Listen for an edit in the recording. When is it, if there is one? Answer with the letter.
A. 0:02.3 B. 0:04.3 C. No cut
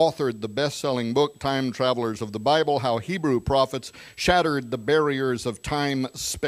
A